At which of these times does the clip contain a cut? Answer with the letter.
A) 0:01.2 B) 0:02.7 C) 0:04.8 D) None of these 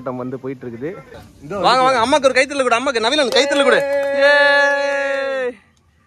A